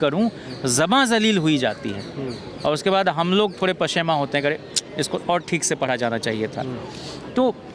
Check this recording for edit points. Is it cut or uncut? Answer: uncut